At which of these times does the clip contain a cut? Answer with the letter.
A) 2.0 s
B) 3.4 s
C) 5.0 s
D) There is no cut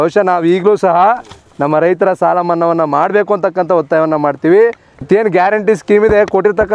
C